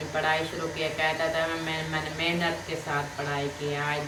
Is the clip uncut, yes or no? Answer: yes